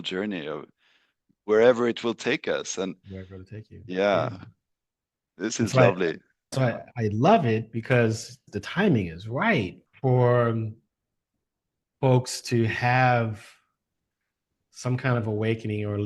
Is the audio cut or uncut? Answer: cut